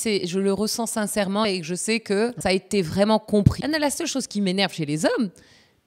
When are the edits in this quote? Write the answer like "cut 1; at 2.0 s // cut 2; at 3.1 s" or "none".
cut 1; at 1.4 s // cut 2; at 2.4 s // cut 3; at 3.6 s